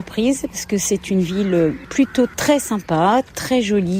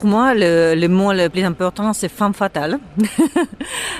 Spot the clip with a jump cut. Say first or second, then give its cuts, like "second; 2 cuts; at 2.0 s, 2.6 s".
second; 1 cut; at 1.3 s